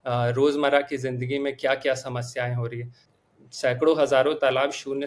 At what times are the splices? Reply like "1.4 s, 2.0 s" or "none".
3.1 s